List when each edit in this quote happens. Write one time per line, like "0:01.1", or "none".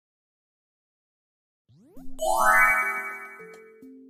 none